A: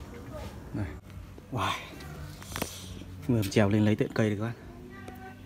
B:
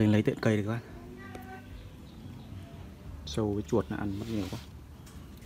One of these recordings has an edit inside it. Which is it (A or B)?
A